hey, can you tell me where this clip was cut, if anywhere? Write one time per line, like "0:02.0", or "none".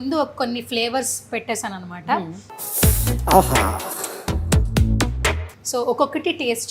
none